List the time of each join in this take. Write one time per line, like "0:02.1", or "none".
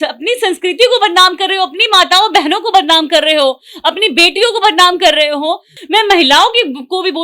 0:05.7